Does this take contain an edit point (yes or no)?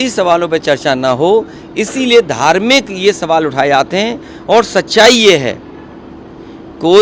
no